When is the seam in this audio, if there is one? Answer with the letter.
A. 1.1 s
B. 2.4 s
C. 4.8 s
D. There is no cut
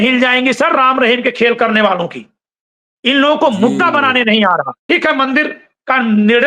C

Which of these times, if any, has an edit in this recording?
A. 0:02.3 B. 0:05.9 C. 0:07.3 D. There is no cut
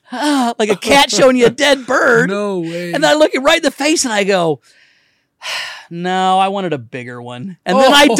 D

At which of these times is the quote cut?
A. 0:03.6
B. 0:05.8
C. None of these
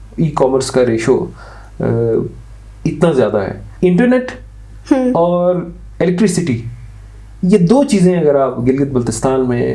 A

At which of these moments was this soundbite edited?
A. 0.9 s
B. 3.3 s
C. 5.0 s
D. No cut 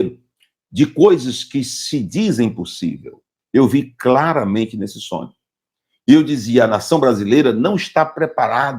B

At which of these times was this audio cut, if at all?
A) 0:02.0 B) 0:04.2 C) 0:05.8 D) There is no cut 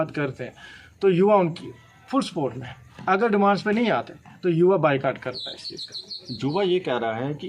D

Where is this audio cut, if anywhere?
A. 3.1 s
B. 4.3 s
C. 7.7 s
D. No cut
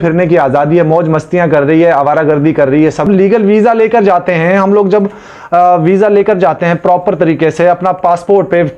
A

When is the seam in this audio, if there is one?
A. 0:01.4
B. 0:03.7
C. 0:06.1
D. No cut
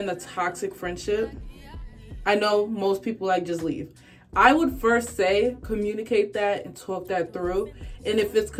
D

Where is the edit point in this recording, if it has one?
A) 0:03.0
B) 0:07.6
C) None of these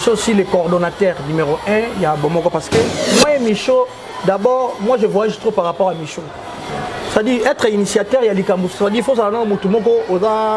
A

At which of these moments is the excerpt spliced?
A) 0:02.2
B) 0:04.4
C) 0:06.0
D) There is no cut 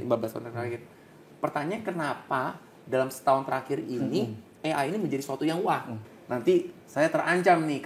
C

